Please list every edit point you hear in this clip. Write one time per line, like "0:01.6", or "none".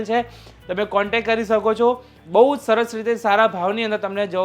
0:02.2